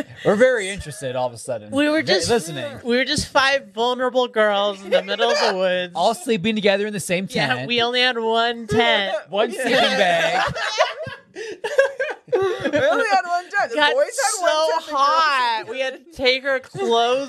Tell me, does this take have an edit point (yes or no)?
no